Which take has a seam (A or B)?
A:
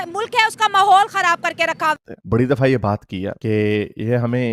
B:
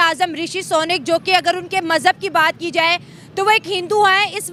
A